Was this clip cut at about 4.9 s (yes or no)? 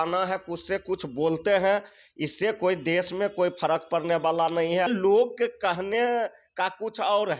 yes